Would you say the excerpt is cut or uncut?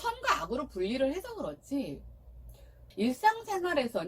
cut